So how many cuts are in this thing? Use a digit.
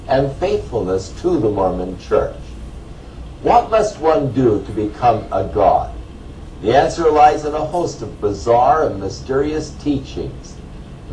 1